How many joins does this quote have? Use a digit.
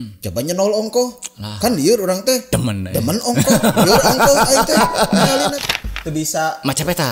1